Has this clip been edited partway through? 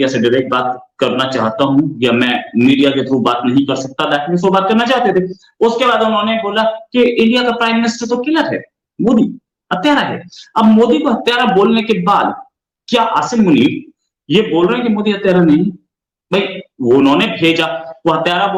no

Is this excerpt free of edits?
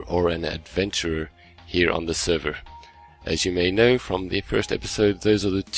no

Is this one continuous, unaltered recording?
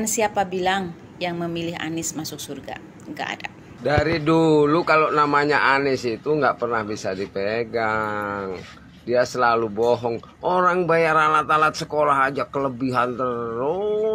no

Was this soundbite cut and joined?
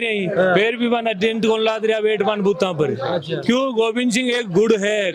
no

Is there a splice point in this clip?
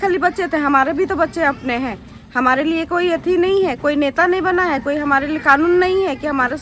no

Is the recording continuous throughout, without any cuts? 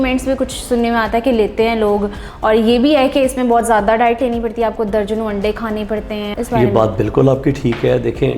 no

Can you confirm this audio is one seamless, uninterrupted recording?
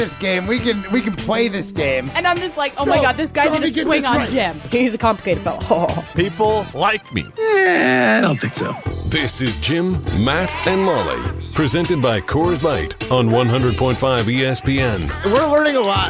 no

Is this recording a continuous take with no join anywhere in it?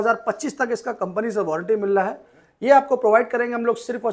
yes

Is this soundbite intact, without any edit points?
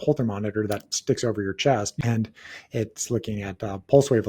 no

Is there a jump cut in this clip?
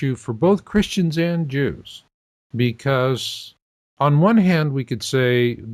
yes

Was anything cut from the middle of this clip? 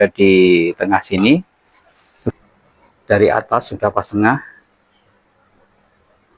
yes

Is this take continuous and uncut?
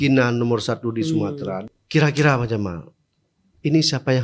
no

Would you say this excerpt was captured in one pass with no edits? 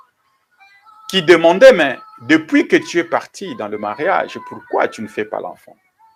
yes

